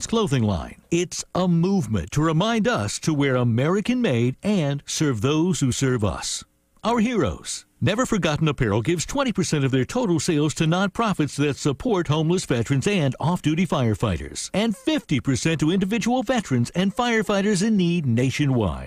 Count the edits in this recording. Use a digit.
0